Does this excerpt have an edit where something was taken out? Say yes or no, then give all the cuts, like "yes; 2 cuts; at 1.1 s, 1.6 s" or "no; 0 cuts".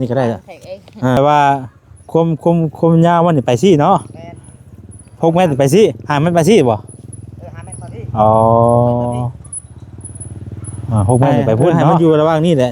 yes; 2 cuts; at 1.2 s, 11.8 s